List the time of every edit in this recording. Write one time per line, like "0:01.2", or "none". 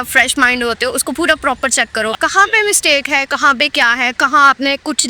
0:02.1